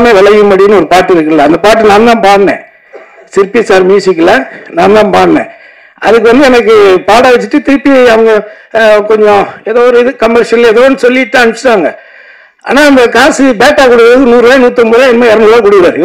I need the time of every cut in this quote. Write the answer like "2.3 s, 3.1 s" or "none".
none